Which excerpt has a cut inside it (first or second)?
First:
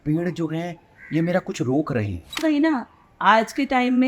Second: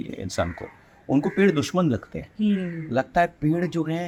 first